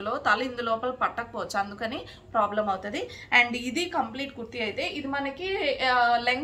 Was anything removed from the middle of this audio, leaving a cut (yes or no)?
no